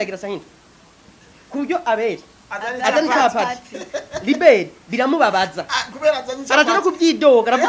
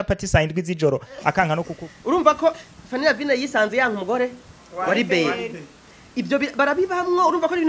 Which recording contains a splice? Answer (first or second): second